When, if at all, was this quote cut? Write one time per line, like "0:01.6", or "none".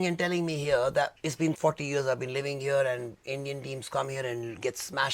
0:01.5